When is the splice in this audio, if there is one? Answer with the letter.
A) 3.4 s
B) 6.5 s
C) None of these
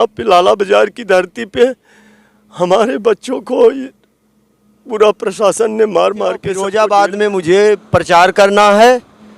B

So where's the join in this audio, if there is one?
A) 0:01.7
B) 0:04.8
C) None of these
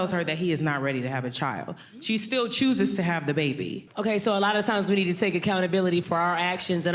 C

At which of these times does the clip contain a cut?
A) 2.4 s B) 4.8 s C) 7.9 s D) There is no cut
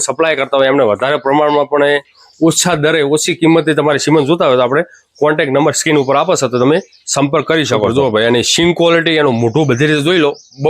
C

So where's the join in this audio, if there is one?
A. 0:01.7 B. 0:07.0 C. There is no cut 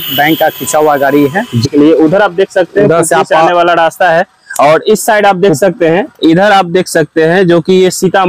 A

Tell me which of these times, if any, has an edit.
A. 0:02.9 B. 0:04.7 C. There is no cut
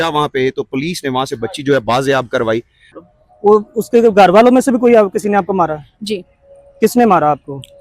A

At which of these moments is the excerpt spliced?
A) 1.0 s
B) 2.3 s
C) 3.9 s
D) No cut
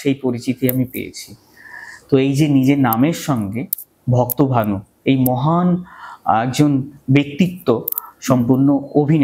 D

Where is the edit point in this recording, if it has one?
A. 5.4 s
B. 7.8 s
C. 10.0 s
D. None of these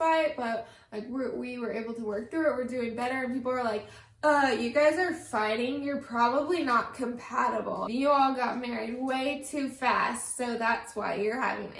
B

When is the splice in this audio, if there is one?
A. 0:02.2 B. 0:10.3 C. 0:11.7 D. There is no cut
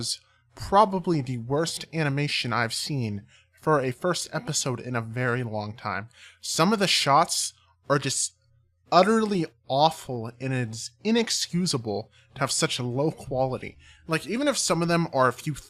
D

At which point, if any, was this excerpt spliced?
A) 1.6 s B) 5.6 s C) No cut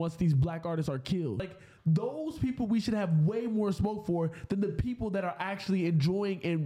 A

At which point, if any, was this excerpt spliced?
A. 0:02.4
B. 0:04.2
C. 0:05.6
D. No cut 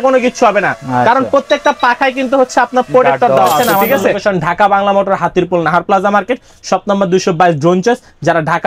B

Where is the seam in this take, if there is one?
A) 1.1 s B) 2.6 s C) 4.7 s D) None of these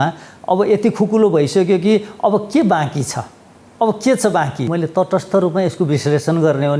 C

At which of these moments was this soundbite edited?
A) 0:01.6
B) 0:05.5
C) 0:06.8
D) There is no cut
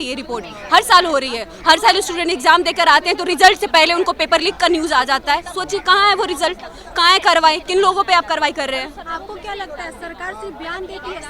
D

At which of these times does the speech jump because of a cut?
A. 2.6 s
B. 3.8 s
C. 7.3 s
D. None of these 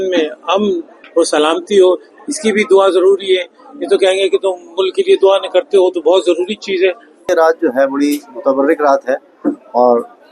C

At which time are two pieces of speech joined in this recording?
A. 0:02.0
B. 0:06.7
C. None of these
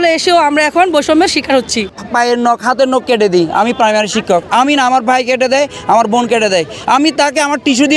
A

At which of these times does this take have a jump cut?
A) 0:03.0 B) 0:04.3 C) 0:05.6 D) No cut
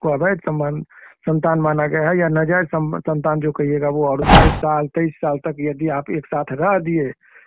B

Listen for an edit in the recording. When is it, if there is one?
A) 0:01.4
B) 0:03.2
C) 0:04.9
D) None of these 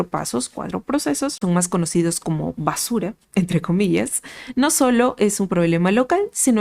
A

